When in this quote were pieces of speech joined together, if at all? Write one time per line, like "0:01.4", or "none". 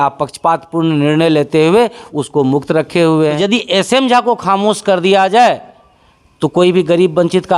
0:03.4